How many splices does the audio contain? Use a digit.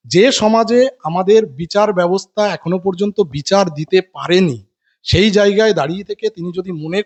0